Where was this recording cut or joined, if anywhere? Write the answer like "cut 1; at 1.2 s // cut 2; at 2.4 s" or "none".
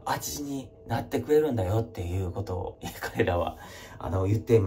none